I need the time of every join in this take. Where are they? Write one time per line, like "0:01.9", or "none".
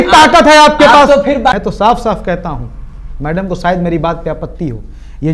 0:01.5